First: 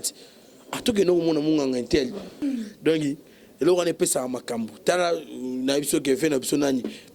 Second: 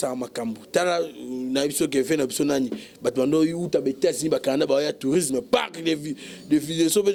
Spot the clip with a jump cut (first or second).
first